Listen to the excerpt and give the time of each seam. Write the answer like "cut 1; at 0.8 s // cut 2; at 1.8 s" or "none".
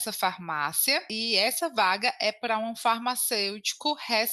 cut 1; at 1.1 s